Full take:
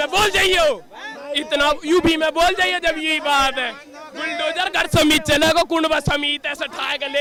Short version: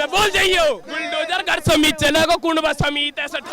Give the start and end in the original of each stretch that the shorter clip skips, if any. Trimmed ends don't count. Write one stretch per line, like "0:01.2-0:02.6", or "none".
0:00.9-0:04.2